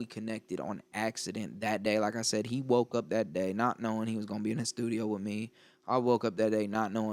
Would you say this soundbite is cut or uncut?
uncut